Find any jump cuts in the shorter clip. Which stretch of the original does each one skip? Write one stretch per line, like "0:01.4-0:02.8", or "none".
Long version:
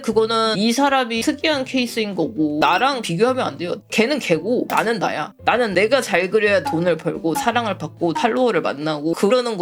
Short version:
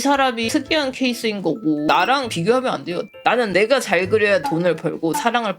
0:03.8-0:05.3